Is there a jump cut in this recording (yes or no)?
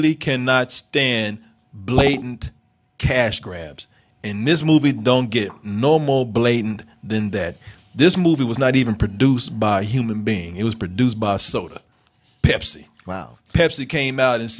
no